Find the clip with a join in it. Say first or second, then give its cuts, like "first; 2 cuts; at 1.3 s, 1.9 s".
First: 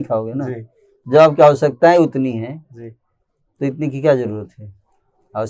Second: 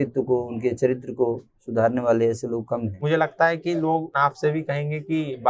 second; 2 cuts; at 3.0 s, 4.1 s